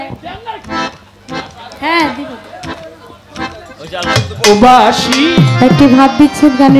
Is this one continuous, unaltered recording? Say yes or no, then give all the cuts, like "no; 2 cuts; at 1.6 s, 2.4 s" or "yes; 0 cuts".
yes; 0 cuts